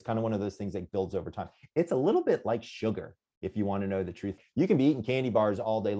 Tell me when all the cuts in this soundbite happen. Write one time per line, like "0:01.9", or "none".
0:04.4

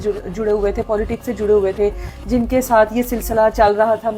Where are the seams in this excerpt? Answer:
none

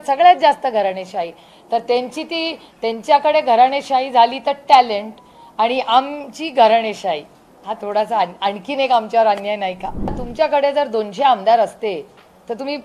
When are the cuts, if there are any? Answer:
0:10.2

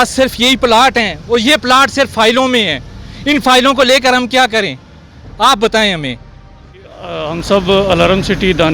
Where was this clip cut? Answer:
0:07.3

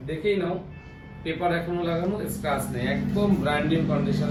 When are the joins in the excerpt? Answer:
none

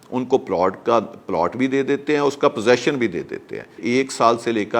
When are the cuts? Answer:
0:03.8

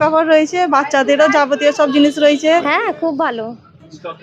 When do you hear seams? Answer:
0:02.7

